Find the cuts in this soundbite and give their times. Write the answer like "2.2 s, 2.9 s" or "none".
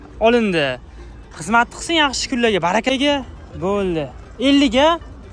2.9 s